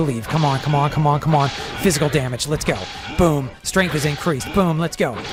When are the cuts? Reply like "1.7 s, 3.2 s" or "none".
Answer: none